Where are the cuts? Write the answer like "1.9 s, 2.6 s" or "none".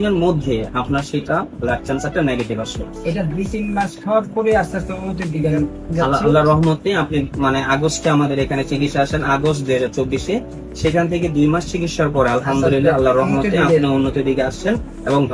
none